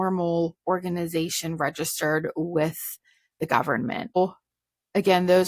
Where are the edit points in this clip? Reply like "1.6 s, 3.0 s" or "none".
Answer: 4.2 s